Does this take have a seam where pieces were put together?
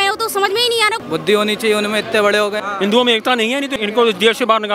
yes; 2 cuts; at 1.0 s, 2.6 s

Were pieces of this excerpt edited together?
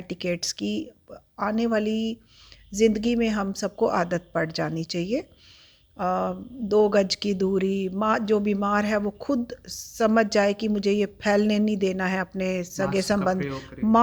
no; 0 cuts

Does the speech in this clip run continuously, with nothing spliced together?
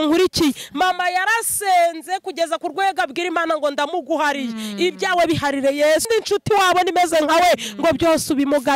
no; 1 cut; at 6.1 s

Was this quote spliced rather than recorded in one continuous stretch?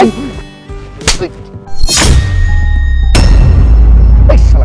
no; 0 cuts

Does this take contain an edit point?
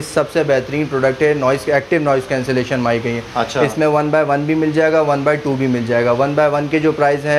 no; 0 cuts

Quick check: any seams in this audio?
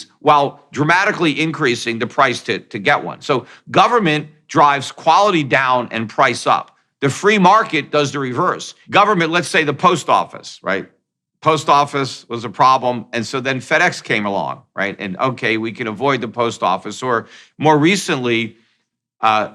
yes; 1 cut; at 8.7 s

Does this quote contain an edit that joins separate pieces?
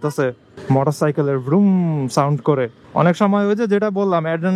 yes; 1 cut; at 2.8 s

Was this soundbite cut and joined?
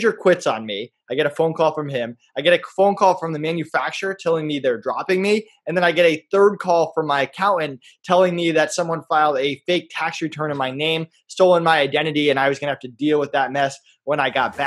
no; 0 cuts

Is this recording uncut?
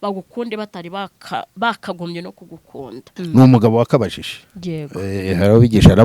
no; 1 cut; at 3.1 s

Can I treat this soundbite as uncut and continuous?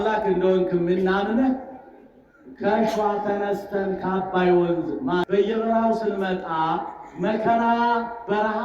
no; 1 cut; at 5.3 s

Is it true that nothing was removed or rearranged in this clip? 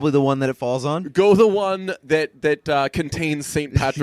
yes; 0 cuts

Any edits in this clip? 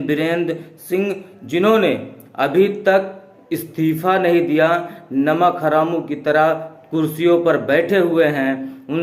no; 0 cuts

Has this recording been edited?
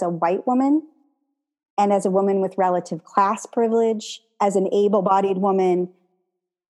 yes; 1 cut; at 4.2 s

